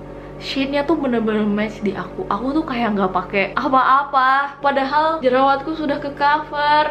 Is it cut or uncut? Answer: uncut